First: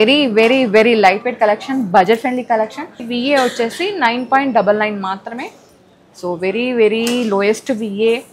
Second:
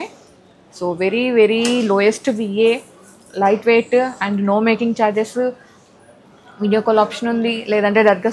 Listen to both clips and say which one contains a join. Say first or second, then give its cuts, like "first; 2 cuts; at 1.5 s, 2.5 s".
first; 1 cut; at 3.0 s